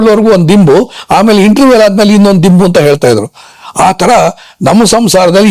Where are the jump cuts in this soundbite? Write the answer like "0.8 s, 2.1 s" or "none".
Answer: none